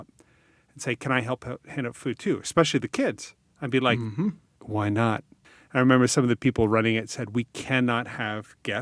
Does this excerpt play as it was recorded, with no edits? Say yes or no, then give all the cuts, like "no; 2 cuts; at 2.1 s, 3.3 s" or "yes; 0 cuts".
no; 2 cuts; at 4.5 s, 5.3 s